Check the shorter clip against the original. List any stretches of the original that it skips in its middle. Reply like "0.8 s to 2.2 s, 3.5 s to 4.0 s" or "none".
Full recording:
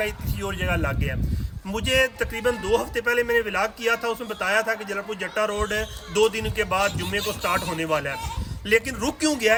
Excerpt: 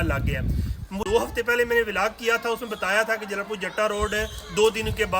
1.8 s to 2.6 s